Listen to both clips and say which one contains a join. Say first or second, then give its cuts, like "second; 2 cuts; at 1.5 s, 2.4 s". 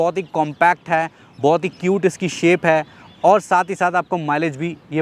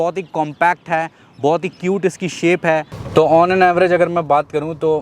second; 1 cut; at 3.0 s